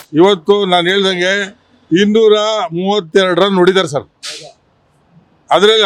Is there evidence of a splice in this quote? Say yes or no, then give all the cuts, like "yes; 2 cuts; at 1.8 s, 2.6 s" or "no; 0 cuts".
no; 0 cuts